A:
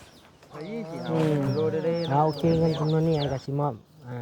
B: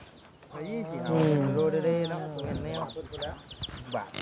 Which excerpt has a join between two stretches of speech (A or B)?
A